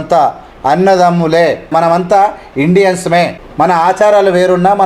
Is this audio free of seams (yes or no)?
no